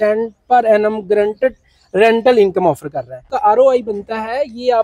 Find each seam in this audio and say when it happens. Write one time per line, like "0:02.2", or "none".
0:03.3